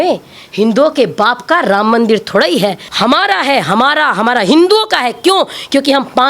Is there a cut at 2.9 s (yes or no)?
yes